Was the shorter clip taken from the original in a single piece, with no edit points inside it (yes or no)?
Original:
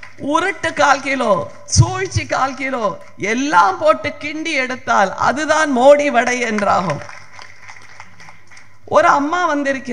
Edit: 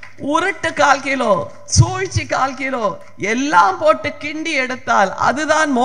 yes